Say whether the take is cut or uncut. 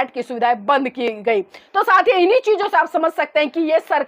uncut